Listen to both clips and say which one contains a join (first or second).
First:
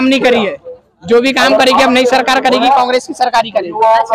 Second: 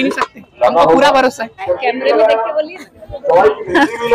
second